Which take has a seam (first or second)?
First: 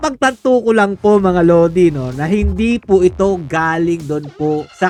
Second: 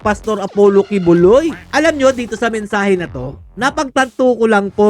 second